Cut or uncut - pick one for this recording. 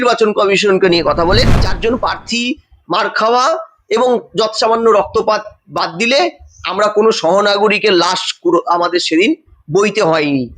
cut